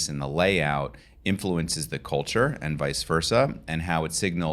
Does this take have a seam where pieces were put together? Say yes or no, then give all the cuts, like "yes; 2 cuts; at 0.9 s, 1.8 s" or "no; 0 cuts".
no; 0 cuts